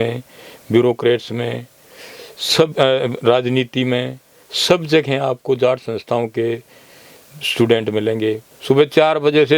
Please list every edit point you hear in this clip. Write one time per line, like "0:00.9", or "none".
0:08.5